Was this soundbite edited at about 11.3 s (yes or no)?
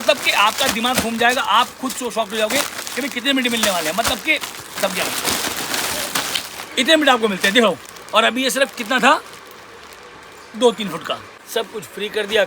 yes